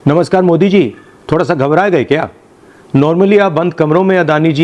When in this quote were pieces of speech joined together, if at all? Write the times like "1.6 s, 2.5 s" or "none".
none